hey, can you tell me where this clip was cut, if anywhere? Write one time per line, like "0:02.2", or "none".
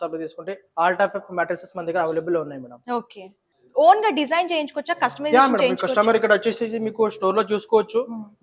none